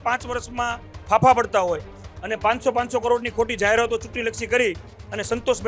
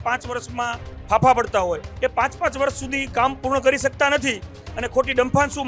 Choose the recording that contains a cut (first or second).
second